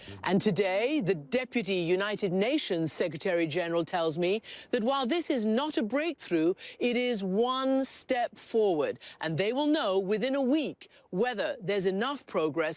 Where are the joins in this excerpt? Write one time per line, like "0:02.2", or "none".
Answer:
0:01.0

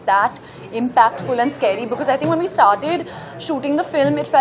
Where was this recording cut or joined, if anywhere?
none

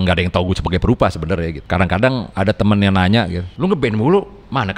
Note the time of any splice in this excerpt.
0:01.6
0:02.3
0:03.4

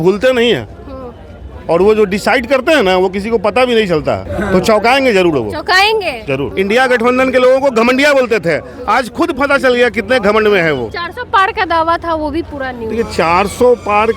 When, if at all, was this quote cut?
0:04.3
0:06.5
0:11.0

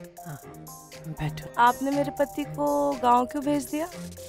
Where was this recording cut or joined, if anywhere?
0:01.5

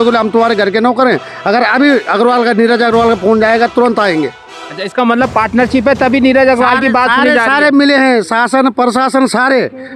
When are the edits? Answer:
none

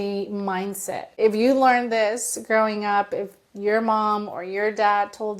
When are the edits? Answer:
0:01.0

